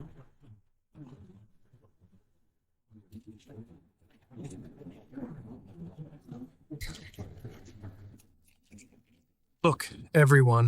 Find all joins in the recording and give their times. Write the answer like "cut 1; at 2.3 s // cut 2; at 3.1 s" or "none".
cut 1; at 6.8 s // cut 2; at 8.2 s